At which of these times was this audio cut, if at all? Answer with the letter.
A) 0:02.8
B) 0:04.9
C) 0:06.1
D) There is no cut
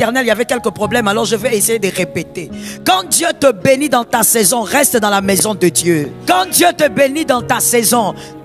C